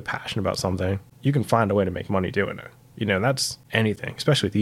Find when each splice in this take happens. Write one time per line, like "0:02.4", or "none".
0:01.1
0:03.5